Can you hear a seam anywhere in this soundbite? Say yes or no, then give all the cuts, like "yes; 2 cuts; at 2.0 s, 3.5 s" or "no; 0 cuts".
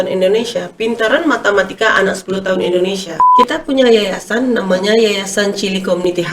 yes; 1 cut; at 3.2 s